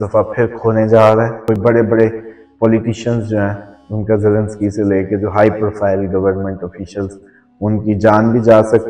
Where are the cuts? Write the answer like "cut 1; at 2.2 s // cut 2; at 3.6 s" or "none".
cut 1; at 1.6 s